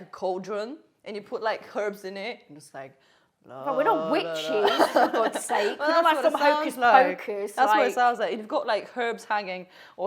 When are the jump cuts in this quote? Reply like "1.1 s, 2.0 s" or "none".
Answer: none